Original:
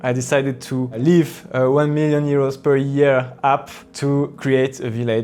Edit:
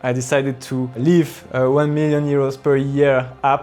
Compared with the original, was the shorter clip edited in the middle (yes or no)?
no